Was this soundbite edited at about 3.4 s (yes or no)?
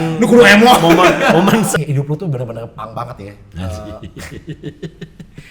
no